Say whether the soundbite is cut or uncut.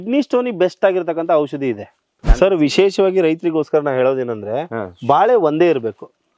cut